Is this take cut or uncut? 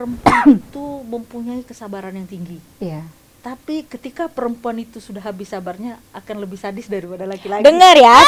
uncut